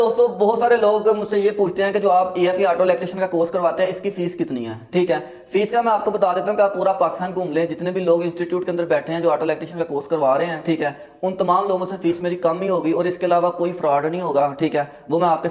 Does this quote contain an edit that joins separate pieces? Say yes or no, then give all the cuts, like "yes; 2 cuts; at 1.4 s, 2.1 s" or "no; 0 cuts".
no; 0 cuts